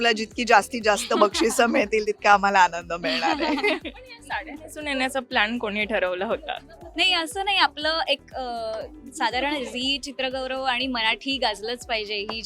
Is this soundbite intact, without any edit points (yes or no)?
yes